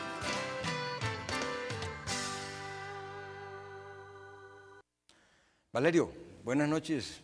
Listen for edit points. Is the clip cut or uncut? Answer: cut